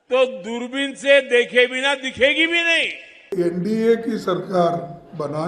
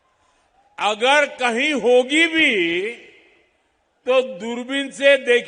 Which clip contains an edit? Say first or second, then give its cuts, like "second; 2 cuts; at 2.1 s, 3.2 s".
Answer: first; 1 cut; at 3.3 s